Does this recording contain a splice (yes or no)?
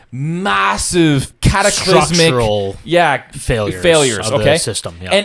yes